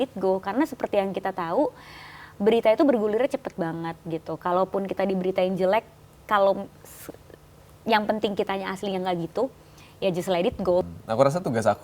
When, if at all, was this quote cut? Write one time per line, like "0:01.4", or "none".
0:10.8

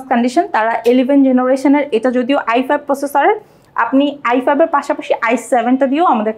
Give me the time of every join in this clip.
none

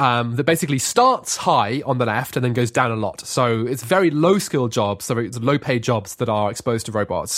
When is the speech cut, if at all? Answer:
none

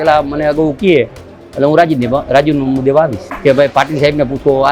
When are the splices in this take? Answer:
0:03.3

